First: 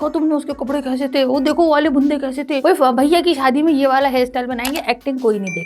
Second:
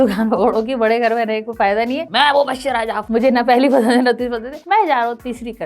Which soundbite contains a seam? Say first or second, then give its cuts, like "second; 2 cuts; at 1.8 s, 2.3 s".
second; 3 cuts; at 2.0 s, 3.0 s, 4.5 s